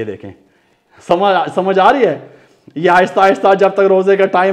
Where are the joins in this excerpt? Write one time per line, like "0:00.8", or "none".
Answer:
none